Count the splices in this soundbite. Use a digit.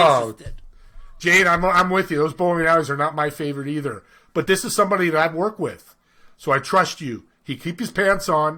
0